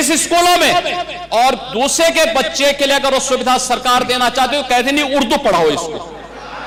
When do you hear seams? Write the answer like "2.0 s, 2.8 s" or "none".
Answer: none